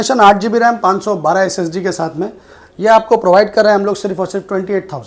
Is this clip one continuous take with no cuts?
yes; 0 cuts

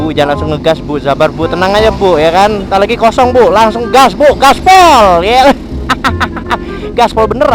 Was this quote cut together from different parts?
no; 0 cuts

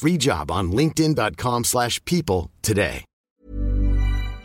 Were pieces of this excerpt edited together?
yes; 1 cut; at 3.4 s

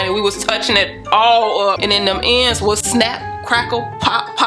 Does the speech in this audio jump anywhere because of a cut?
yes; 1 cut; at 1.8 s

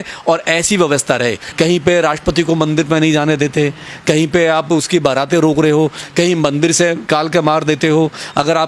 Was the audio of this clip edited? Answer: yes; 2 cuts; at 1.4 s, 7.1 s

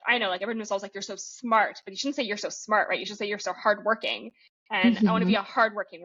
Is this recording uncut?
yes; 0 cuts

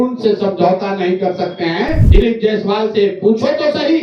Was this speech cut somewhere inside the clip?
yes; 1 cut; at 2.0 s

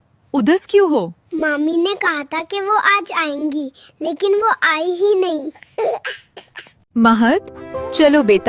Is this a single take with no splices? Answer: yes; 0 cuts

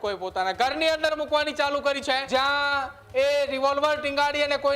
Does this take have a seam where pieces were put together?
yes; 1 cut; at 2.2 s

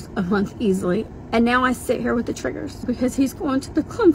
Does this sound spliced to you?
yes; 2 cuts; at 1.1 s, 2.8 s

